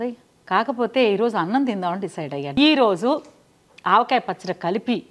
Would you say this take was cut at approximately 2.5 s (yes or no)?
yes